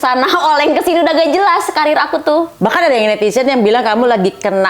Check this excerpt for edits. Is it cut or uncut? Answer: cut